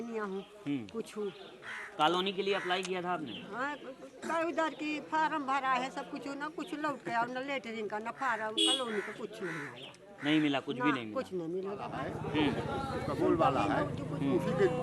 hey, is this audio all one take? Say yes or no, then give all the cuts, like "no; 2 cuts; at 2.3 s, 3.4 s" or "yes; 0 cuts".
no; 1 cut; at 12.0 s